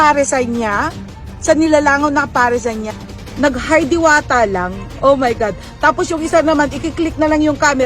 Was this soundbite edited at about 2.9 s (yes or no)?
yes